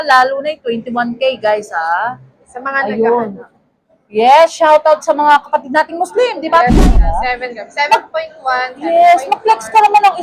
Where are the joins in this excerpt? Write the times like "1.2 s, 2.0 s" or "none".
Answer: 6.8 s